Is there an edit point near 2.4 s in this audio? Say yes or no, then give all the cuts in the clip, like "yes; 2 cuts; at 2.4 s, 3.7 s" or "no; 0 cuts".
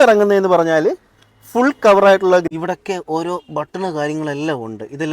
yes; 1 cut; at 2.4 s